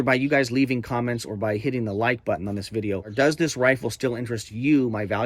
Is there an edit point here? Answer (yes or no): yes